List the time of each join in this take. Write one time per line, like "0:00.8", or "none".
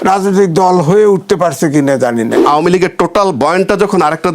0:02.4